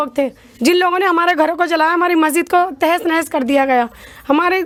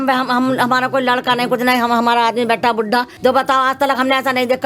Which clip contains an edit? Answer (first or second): second